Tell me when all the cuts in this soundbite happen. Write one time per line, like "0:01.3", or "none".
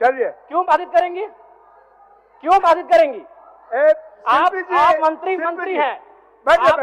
none